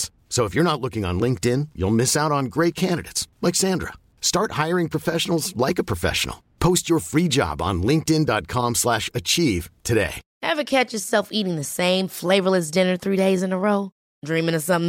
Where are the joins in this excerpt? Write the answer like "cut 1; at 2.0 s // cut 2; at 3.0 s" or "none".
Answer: cut 1; at 10.2 s